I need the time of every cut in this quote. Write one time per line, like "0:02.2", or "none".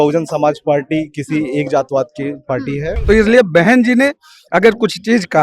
0:02.9

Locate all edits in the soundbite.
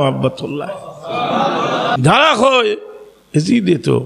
0:02.0

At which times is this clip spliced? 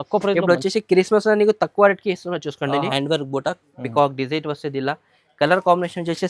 0:02.9

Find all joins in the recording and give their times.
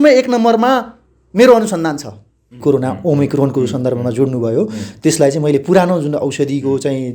0:02.6

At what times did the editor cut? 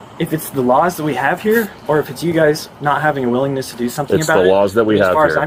none

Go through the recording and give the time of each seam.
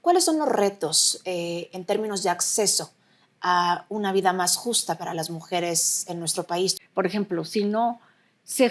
0:06.7

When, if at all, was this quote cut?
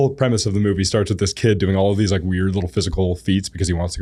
none

